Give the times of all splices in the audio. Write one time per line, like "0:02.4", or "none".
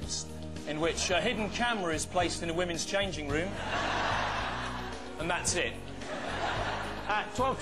none